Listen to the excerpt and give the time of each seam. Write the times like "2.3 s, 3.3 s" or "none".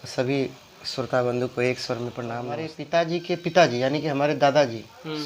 2.7 s